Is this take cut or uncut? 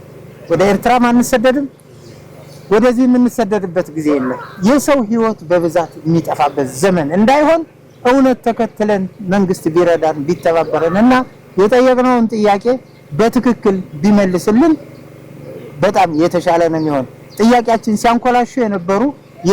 uncut